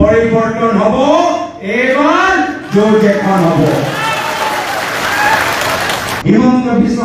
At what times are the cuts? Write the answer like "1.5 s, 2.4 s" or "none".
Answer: 6.1 s